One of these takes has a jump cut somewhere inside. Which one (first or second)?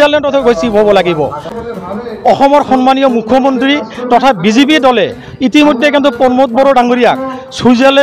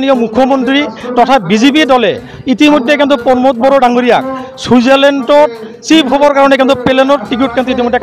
first